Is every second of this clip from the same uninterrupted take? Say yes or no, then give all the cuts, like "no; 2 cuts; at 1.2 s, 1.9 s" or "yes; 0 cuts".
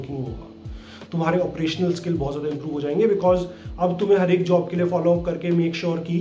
yes; 0 cuts